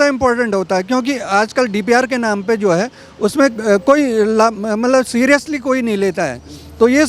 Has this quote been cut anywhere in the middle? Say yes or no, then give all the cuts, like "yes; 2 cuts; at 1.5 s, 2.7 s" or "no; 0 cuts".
no; 0 cuts